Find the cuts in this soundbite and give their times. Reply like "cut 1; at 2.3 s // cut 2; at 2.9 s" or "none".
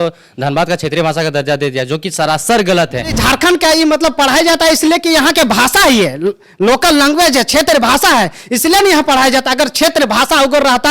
cut 1; at 3.1 s